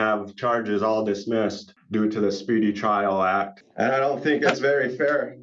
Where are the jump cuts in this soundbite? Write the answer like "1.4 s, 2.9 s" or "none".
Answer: 1.7 s, 3.6 s